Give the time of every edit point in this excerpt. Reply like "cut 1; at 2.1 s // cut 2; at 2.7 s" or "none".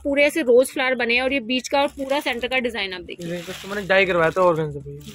none